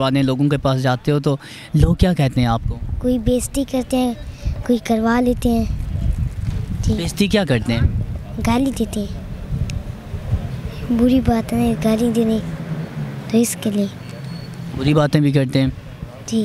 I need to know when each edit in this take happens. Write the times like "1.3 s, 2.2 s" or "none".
none